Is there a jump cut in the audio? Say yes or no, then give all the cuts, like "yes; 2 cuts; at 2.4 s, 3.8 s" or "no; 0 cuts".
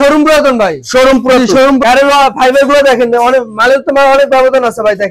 yes; 1 cut; at 1.8 s